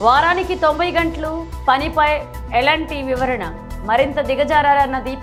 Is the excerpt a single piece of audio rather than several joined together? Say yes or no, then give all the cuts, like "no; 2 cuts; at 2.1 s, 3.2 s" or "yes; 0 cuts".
yes; 0 cuts